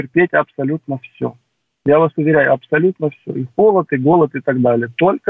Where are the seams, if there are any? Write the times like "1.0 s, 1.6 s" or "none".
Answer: none